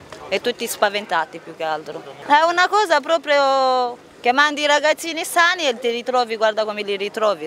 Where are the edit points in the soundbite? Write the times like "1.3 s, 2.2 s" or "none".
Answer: none